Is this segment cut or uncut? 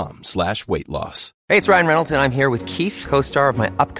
cut